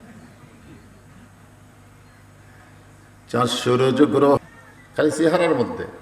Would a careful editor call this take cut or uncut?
cut